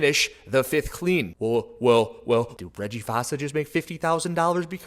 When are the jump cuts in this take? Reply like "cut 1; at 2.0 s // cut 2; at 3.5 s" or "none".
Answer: cut 1; at 2.5 s